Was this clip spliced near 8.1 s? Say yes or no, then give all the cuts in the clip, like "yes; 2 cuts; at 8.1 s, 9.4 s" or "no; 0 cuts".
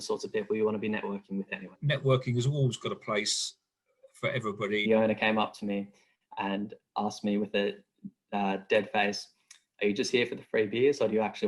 no; 2 cuts; at 1.8 s, 4.8 s